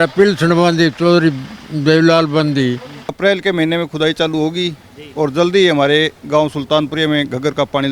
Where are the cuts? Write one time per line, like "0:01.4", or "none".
0:03.0